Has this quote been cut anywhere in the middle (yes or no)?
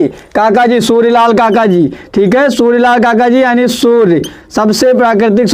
no